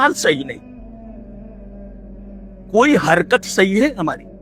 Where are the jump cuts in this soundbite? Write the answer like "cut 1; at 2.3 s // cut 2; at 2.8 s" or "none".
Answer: none